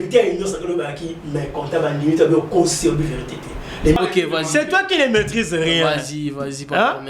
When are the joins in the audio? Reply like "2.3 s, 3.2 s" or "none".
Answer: 4.0 s